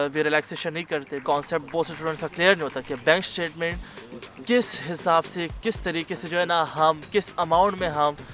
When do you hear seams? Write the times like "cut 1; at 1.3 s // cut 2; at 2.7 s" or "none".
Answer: cut 1; at 1.2 s